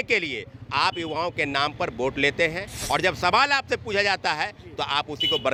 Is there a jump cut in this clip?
no; 0 cuts

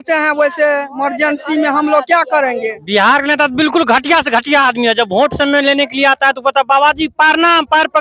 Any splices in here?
yes; 1 cut; at 2.8 s

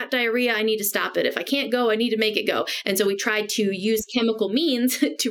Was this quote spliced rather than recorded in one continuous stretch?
no; 0 cuts

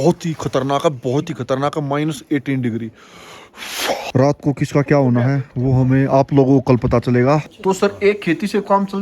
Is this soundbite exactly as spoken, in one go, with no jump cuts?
no; 2 cuts; at 4.0 s, 7.5 s

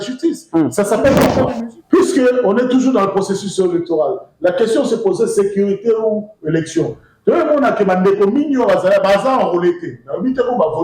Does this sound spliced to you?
yes; 1 cut; at 1.4 s

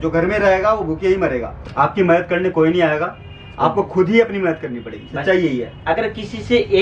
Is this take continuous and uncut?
no; 1 cut; at 1.6 s

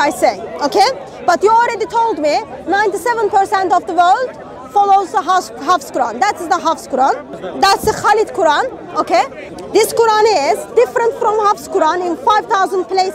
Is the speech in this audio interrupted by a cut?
yes; 2 cuts; at 7.4 s, 9.4 s

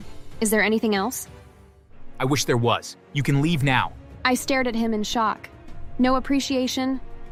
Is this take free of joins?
yes; 0 cuts

